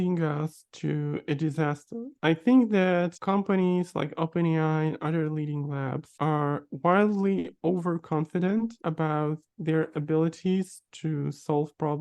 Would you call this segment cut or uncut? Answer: uncut